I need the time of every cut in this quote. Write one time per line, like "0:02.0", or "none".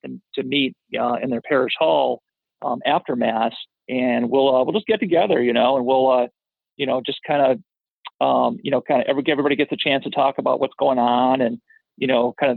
none

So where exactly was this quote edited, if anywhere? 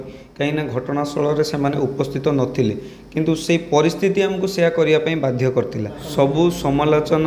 0:06.0

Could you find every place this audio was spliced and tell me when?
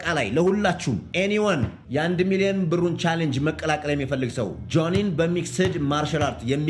none

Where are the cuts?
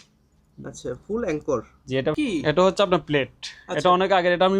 0:02.2

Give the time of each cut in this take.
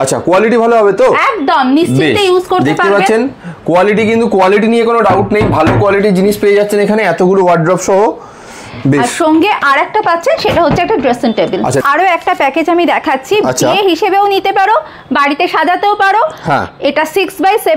0:11.8

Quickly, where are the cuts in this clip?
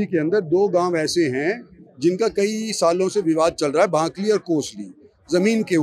none

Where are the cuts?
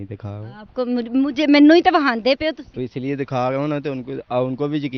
none

